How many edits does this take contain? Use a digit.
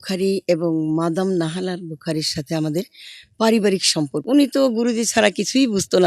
1